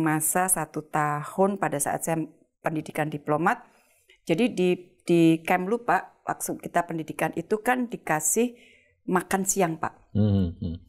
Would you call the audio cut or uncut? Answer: uncut